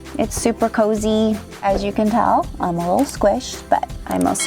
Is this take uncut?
no; 1 cut; at 1.5 s

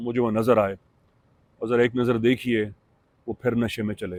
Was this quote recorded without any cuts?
yes; 0 cuts

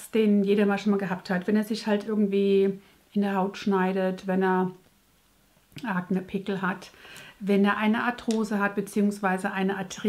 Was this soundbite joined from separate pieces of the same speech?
no; 0 cuts

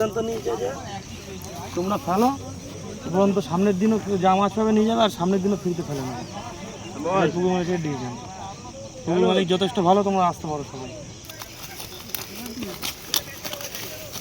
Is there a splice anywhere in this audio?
yes; 1 cut; at 11.2 s

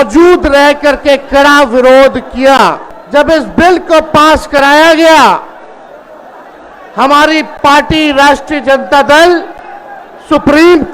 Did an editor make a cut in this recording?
yes; 1 cut; at 2.9 s

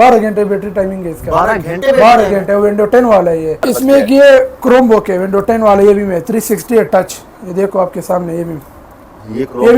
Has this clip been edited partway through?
yes; 1 cut; at 3.6 s

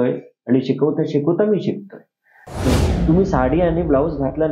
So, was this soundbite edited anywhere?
yes; 1 cut; at 2.7 s

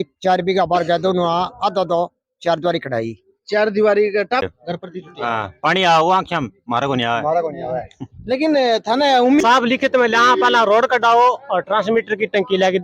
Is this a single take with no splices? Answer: no; 2 cuts; at 4.4 s, 9.4 s

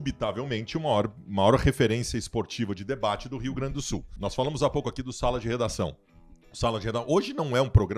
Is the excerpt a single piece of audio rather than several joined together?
no; 1 cut; at 4.1 s

